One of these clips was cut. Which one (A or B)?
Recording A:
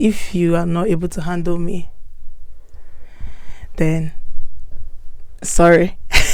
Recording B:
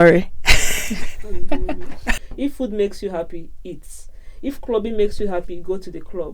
B